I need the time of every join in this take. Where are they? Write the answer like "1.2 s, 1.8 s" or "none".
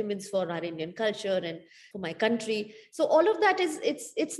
1.8 s

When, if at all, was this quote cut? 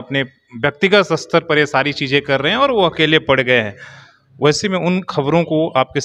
none

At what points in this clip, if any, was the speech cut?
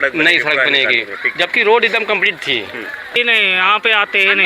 3.1 s

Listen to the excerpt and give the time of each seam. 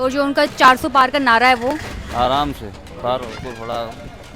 3.3 s

